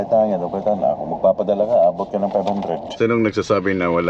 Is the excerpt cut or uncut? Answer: cut